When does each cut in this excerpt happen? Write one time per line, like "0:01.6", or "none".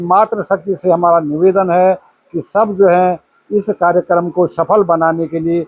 none